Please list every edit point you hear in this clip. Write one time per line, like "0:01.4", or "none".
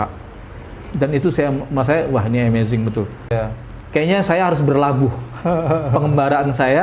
0:03.3